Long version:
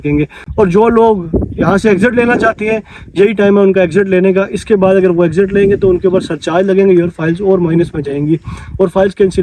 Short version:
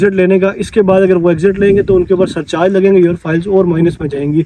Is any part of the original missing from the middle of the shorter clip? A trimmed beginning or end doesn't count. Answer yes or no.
no